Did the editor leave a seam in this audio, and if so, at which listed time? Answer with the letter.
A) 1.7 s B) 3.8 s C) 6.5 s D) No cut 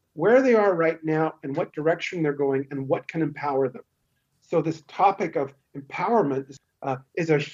C